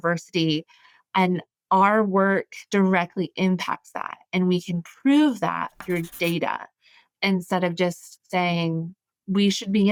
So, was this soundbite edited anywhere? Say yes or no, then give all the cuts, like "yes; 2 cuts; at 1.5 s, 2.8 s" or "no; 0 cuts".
no; 0 cuts